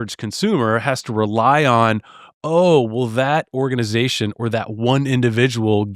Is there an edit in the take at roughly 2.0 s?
no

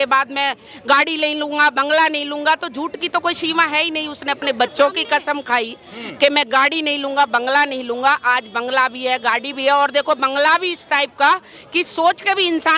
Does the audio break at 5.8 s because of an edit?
no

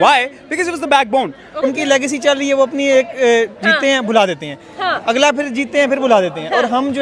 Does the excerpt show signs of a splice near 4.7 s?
no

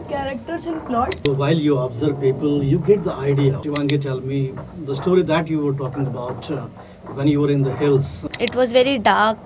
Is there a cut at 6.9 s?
no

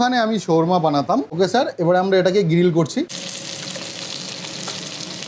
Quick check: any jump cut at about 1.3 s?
no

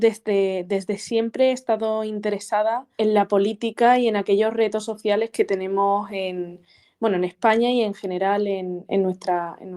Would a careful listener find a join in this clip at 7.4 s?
no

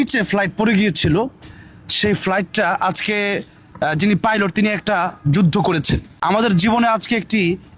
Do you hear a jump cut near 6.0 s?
yes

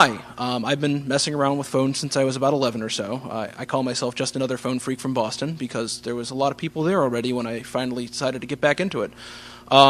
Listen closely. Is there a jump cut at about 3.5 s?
yes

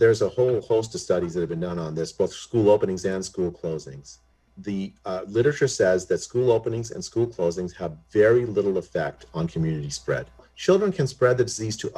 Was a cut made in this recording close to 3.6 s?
no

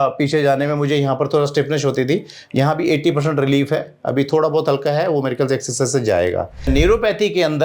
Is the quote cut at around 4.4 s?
no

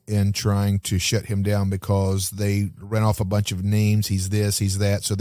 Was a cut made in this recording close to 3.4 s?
no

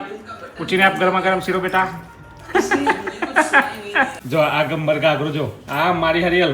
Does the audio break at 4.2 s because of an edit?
yes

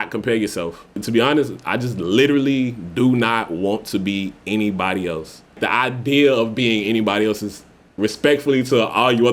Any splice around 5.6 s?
yes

